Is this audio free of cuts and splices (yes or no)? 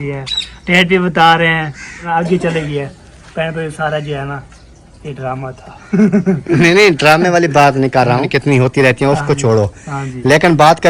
no